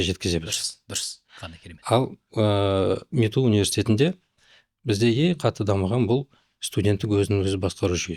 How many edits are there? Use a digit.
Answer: 0